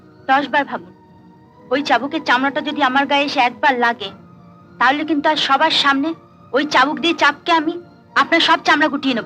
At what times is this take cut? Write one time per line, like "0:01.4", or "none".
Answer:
none